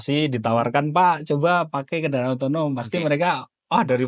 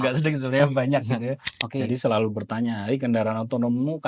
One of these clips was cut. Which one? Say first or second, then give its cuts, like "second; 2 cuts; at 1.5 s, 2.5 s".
second; 1 cut; at 1.5 s